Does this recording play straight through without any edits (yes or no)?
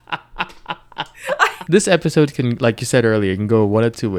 no